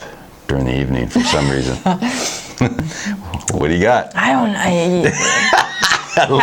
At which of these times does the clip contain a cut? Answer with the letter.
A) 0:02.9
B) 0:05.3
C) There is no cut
A